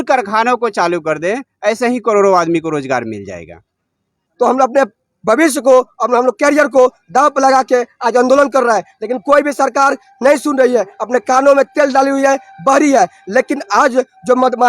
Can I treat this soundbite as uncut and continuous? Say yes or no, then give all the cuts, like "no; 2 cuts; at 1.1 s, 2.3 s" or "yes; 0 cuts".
no; 1 cut; at 4.3 s